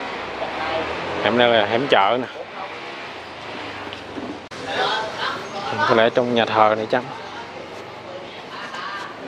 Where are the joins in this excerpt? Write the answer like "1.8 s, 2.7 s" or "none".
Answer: 4.5 s